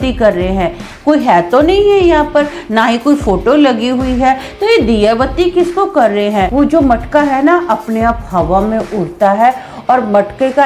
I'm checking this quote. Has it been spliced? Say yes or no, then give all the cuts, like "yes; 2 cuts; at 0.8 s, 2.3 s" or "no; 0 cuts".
yes; 1 cut; at 6.5 s